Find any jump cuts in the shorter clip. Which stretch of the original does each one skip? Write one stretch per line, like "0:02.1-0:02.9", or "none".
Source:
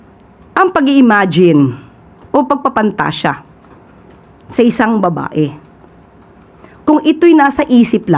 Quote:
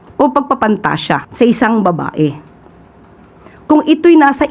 0:03.4-0:04.4

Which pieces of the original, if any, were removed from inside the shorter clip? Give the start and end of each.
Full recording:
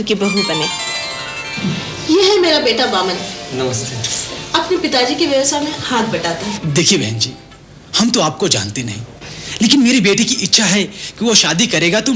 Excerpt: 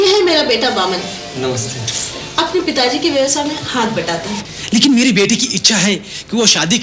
0:06.5-0:09.3

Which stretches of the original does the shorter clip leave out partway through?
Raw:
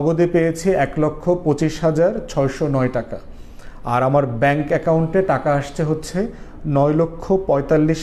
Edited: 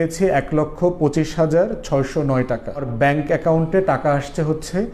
0:03.3-0:04.3

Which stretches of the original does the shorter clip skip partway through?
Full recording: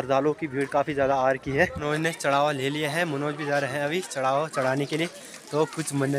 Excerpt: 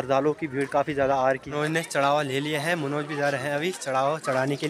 0:01.5-0:01.8

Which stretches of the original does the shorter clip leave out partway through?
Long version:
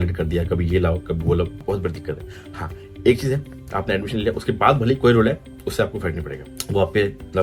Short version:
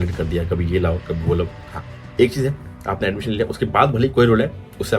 0:01.6-0:02.4

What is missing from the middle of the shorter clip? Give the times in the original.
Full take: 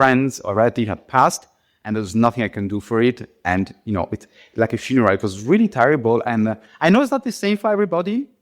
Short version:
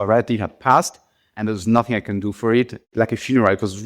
0:03.3-0:04.4

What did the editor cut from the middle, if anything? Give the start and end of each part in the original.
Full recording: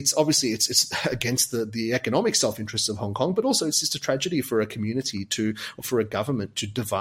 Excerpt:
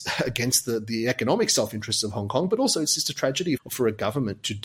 0:04.5-0:05.7

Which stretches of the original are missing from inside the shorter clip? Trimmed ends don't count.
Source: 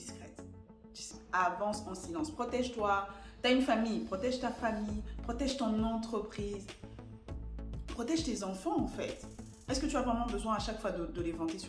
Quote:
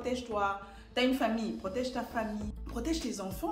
0:05.1-0:07.8

